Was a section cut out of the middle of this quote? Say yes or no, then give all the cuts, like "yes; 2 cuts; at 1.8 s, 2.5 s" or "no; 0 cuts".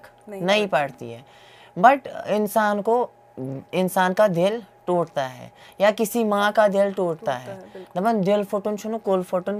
no; 0 cuts